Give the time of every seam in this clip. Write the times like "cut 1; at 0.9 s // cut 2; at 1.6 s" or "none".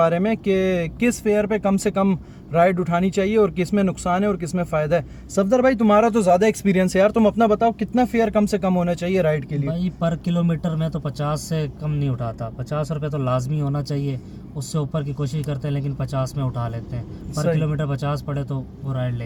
none

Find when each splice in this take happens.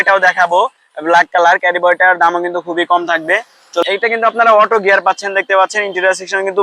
cut 1; at 3.8 s

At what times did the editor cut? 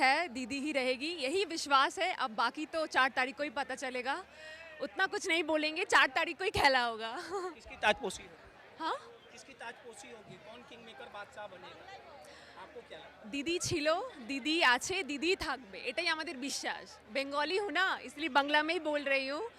none

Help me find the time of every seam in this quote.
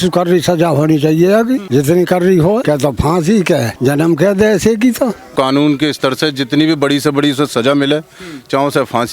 cut 1; at 1.6 s // cut 2; at 2.6 s // cut 3; at 3.7 s // cut 4; at 5.3 s

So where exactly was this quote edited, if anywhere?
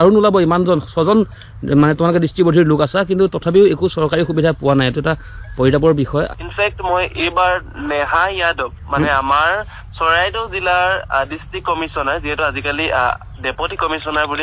cut 1; at 6.3 s

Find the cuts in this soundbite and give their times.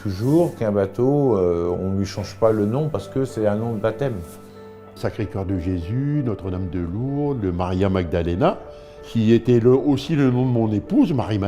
cut 1; at 5.0 s // cut 2; at 9.0 s

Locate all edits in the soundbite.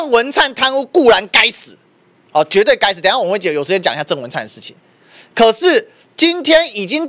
none

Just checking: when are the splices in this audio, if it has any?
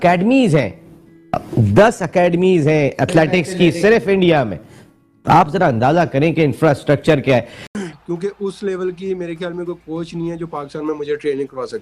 cut 1; at 7.6 s

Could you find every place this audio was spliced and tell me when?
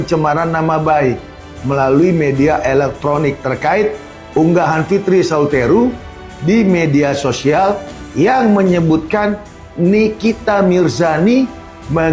none

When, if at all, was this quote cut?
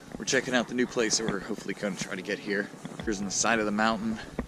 cut 1; at 3.1 s

